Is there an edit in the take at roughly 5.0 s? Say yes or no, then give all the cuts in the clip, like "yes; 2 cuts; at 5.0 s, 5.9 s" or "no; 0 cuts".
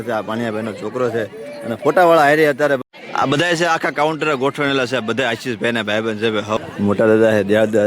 no; 2 cuts; at 2.8 s, 6.6 s